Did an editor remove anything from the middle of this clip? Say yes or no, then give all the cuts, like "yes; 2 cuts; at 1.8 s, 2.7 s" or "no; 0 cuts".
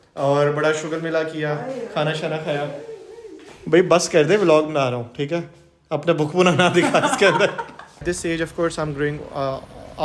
yes; 1 cut; at 8.0 s